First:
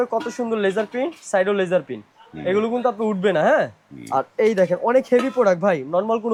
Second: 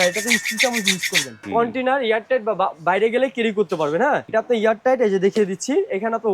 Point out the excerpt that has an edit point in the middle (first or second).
second